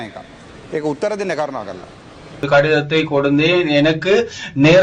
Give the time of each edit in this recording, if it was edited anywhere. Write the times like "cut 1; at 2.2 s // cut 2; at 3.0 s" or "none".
cut 1; at 2.4 s

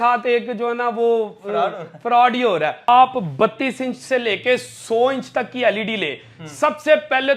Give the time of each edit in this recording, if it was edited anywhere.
cut 1; at 2.9 s

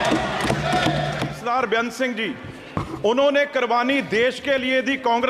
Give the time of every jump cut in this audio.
cut 1; at 1.3 s

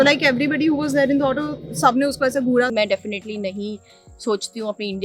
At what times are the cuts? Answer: cut 1; at 2.7 s

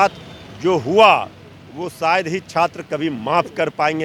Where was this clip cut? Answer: none

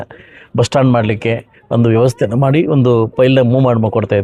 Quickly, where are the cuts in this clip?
none

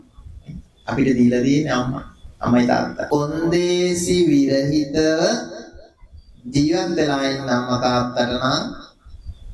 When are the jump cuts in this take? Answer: cut 1; at 3.0 s

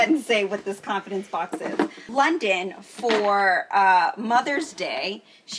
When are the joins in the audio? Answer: none

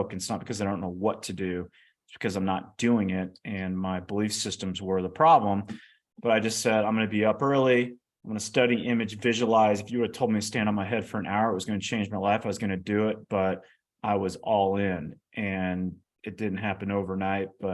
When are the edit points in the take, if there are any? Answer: none

